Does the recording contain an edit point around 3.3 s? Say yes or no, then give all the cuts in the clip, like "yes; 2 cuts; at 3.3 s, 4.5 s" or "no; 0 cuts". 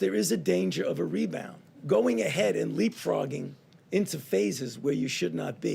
no; 1 cut; at 1.8 s